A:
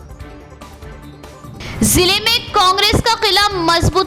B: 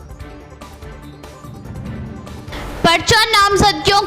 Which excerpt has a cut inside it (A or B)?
A